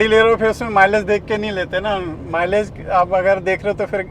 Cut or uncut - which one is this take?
uncut